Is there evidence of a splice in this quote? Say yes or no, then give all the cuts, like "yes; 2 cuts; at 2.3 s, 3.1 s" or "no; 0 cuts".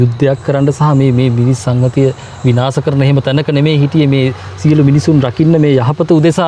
no; 0 cuts